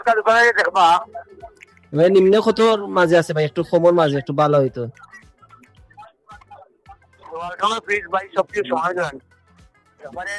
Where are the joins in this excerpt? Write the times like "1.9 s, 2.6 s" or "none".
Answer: none